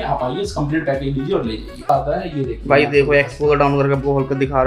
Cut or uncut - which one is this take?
cut